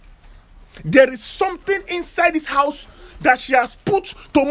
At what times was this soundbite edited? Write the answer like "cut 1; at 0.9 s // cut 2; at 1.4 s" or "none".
none